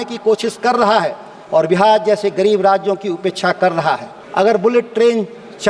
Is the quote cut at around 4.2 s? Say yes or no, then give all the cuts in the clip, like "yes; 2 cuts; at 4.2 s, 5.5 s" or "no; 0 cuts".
yes; 1 cut; at 4.2 s